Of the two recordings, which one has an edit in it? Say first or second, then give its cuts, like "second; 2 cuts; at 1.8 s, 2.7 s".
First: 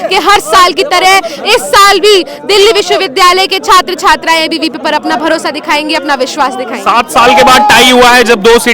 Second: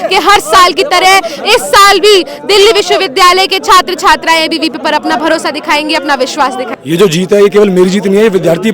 second; 1 cut; at 6.7 s